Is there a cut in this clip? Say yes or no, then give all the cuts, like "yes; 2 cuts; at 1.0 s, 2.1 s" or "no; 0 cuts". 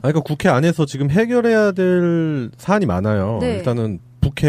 yes; 1 cut; at 2.3 s